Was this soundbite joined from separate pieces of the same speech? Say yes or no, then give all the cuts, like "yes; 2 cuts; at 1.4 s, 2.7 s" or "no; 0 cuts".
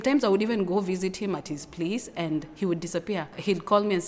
no; 0 cuts